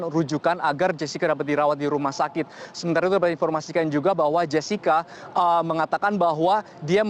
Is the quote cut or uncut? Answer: uncut